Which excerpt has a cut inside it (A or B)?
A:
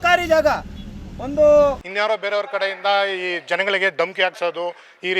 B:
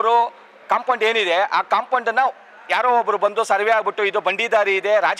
A